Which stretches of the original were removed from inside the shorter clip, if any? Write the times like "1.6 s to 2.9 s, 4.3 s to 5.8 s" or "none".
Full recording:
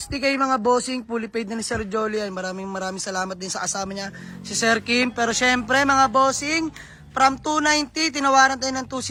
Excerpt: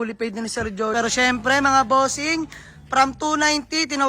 2.1 s to 5.2 s